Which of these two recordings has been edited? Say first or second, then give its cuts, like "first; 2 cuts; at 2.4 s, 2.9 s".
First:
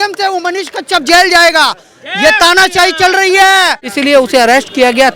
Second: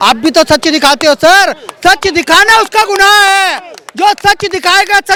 first; 1 cut; at 3.8 s